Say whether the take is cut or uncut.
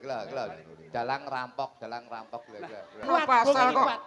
cut